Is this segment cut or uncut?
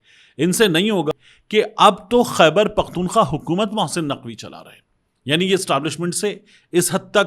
cut